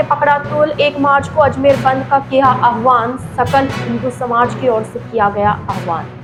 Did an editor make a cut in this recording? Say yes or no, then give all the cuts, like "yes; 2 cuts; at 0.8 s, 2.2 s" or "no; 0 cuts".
no; 0 cuts